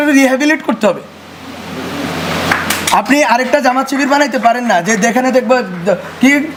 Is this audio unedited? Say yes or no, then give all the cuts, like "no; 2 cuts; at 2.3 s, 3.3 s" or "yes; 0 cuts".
yes; 0 cuts